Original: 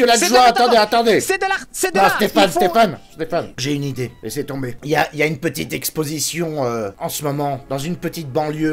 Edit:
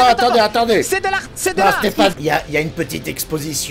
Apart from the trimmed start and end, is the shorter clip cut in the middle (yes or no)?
yes